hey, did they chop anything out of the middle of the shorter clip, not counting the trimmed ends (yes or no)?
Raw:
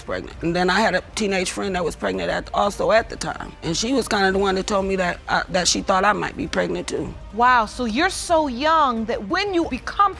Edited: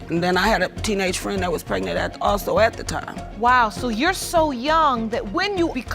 yes